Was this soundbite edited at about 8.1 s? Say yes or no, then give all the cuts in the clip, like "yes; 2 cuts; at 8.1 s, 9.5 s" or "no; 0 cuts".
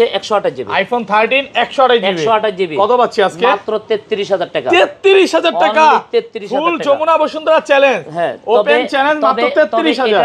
no; 0 cuts